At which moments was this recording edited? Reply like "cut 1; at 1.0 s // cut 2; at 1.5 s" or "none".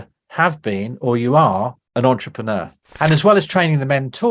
cut 1; at 1.8 s // cut 2; at 2.8 s